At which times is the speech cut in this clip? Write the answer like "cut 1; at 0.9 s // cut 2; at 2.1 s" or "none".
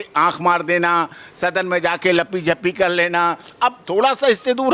none

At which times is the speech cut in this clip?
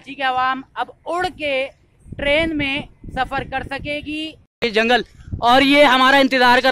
cut 1; at 4.6 s

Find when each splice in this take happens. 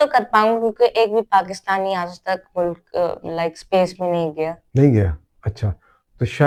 none

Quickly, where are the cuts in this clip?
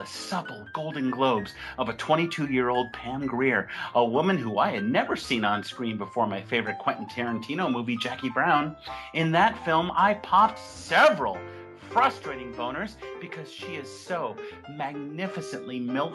cut 1; at 2.9 s

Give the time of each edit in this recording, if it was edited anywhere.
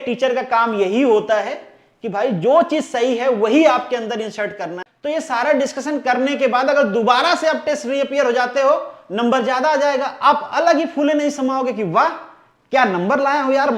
cut 1; at 4.8 s

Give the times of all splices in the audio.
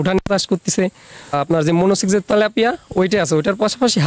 cut 1; at 1.3 s

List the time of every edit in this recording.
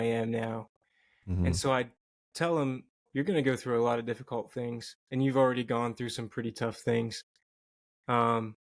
cut 1; at 3.1 s

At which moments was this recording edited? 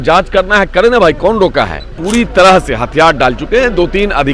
cut 1; at 2.0 s

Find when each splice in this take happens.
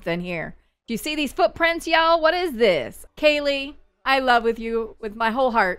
cut 1; at 3.0 s

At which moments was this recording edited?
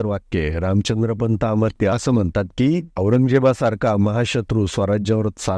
cut 1; at 2.9 s

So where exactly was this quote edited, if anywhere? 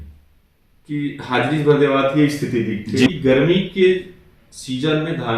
cut 1; at 3.1 s

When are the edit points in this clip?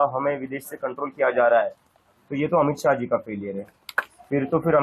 none

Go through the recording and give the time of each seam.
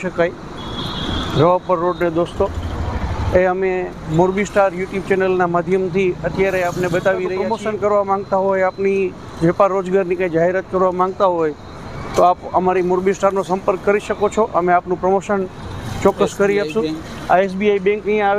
cut 1; at 7.4 s

